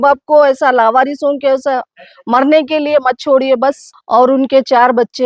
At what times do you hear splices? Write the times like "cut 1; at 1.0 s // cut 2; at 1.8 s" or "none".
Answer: cut 1; at 3.9 s